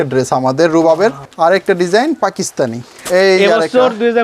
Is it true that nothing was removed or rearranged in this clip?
no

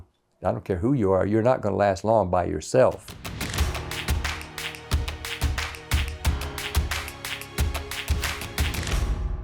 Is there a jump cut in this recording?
yes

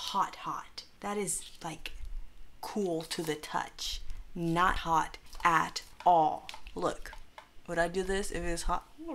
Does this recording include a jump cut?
no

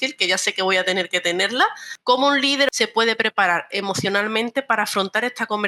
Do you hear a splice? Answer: yes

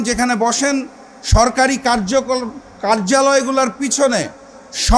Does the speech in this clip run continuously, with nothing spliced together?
yes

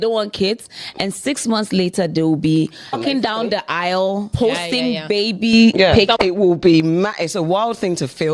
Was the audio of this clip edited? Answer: yes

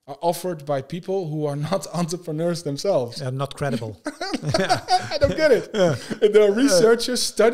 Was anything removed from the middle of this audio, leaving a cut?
no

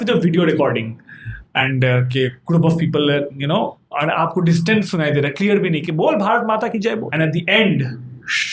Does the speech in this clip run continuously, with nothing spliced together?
no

